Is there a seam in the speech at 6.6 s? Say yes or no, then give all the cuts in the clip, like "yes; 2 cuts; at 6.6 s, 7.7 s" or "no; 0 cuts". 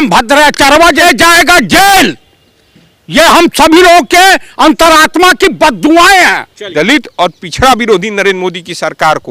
yes; 2 cuts; at 1.0 s, 6.6 s